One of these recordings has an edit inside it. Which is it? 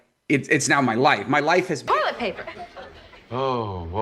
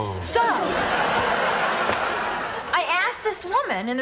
first; 1 cut; at 1.9 s

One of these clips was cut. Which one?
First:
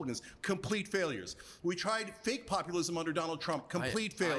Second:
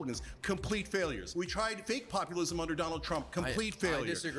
second; 1 cut; at 1.6 s

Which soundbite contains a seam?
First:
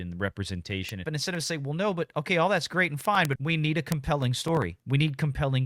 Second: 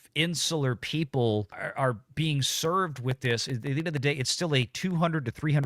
first; 3 cuts; at 1.0 s, 3.4 s, 4.8 s

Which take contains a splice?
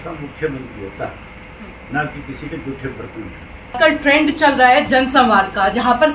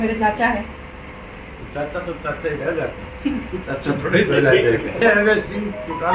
first; 1 cut; at 3.8 s

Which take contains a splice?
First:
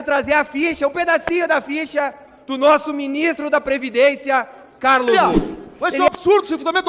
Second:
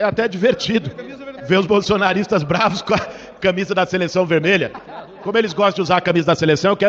first; 1 cut; at 5.1 s

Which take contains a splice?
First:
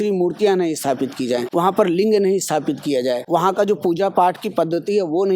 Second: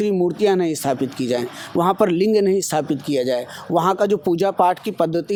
first; 2 cuts; at 1.5 s, 3.2 s

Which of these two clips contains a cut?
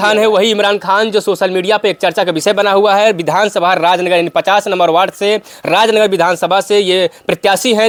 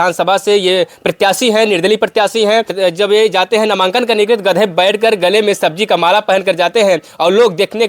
second; 1 cut; at 2.7 s

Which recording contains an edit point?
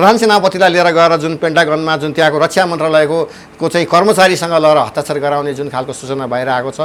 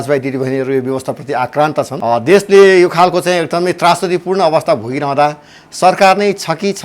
second; 1 cut; at 1.9 s

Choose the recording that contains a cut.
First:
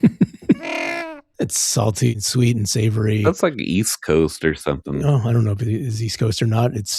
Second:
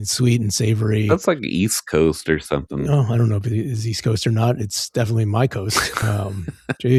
first; 1 cut; at 0.9 s

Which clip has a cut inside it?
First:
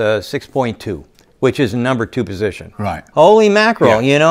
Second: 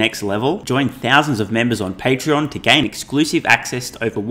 first; 1 cut; at 3.0 s

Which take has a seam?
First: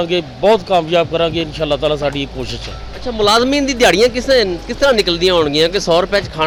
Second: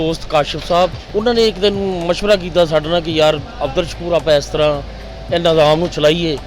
second; 1 cut; at 1.0 s

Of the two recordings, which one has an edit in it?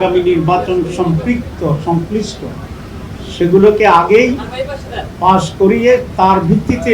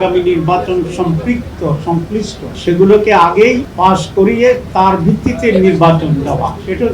second; 2 cuts; at 2.4 s, 3.7 s

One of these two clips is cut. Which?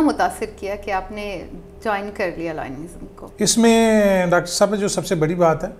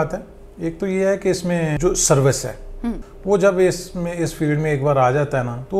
second; 1 cut; at 3.1 s

